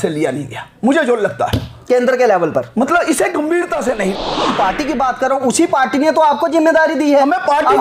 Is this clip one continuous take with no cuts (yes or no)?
no